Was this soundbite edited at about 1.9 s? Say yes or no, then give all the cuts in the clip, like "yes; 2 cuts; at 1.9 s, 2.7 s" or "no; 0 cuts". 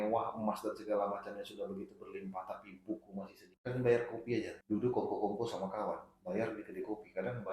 no; 2 cuts; at 3.5 s, 4.6 s